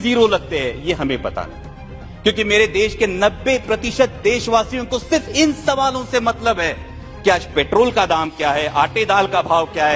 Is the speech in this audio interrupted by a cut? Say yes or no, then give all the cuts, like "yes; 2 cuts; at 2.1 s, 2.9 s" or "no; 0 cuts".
no; 0 cuts